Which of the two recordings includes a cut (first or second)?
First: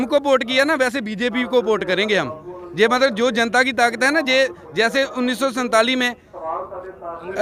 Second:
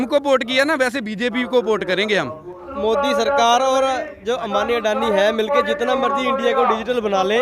second